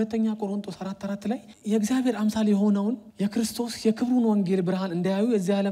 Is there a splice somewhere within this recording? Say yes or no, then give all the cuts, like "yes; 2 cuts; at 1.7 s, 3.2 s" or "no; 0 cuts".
yes; 2 cuts; at 1.5 s, 3.1 s